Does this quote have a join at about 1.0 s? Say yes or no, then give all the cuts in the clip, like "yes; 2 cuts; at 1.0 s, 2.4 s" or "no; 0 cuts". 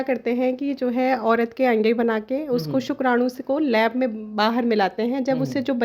no; 0 cuts